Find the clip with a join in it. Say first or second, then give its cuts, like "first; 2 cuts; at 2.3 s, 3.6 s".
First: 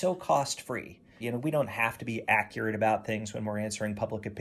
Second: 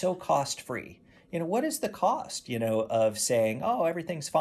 first; 1 cut; at 1.2 s